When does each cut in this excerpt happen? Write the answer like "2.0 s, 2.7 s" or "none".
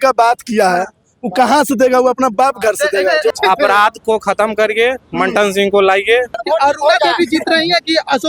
3.3 s, 6.4 s